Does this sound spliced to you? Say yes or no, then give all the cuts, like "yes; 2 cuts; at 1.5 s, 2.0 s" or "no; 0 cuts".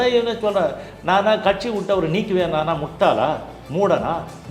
yes; 1 cut; at 2.9 s